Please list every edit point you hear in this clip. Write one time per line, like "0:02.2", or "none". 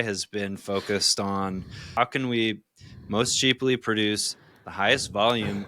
0:02.0